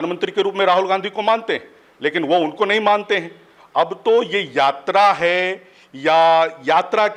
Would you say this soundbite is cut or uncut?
uncut